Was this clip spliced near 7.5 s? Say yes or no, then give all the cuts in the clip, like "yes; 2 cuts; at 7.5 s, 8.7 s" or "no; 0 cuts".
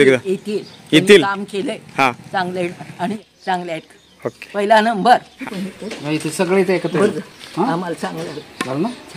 no; 2 cuts; at 3.1 s, 5.3 s